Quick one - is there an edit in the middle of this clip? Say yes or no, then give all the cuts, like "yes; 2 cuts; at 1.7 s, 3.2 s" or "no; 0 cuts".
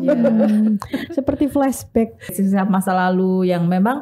yes; 1 cut; at 2.3 s